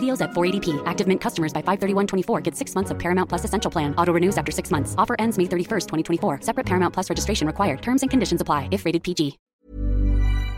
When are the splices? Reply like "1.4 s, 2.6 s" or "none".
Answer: 9.5 s